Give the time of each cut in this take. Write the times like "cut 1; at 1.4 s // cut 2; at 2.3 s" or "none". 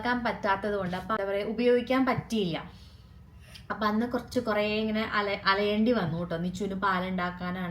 cut 1; at 1.2 s